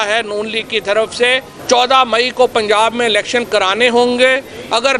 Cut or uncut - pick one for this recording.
cut